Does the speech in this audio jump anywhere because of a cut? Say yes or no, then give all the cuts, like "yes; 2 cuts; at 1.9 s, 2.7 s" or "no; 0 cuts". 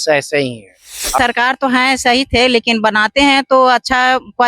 yes; 1 cut; at 1.2 s